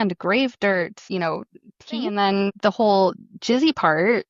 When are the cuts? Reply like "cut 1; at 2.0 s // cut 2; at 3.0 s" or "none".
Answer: cut 1; at 2.1 s